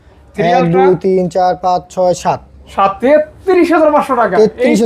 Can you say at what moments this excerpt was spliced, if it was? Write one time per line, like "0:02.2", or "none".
0:03.0

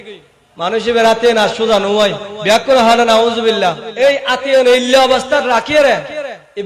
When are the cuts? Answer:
0:03.8

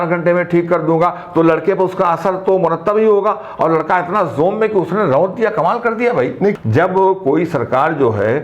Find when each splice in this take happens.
0:06.6

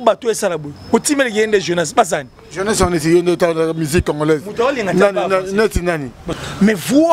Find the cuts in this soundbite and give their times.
0:06.2

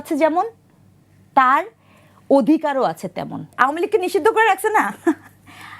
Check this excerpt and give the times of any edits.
0:03.4

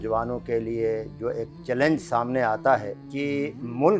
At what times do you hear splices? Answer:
0:03.0

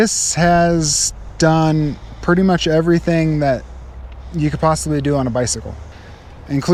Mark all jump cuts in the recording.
none

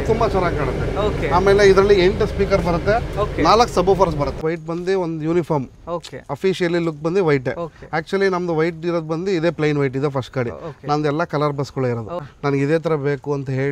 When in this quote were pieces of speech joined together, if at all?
0:04.4
0:12.2

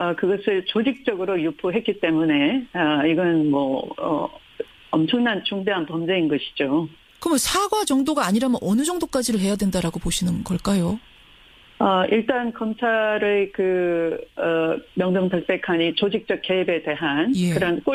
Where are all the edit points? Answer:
none

